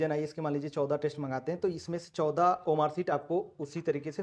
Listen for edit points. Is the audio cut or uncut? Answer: uncut